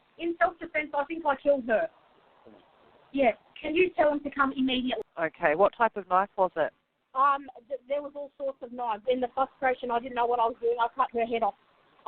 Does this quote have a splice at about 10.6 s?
no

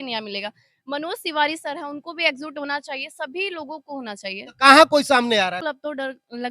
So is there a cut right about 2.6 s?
no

